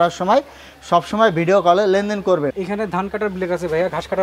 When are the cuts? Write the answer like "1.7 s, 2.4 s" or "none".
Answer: 2.6 s